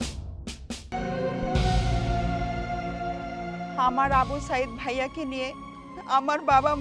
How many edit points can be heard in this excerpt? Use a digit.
1